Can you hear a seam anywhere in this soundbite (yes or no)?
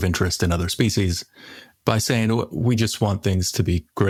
no